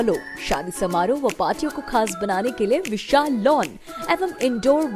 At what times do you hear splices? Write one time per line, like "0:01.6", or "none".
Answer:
none